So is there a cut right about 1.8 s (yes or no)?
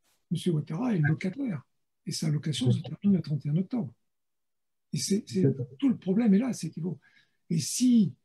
no